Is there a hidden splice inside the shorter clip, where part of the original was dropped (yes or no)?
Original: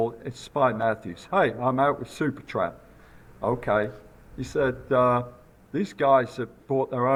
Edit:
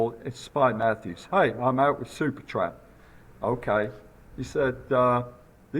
no